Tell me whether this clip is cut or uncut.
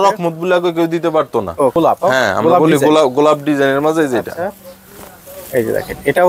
cut